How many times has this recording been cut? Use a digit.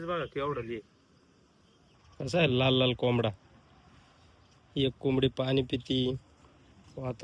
1